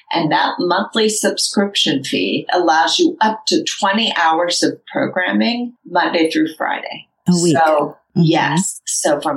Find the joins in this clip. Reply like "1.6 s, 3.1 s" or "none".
5.8 s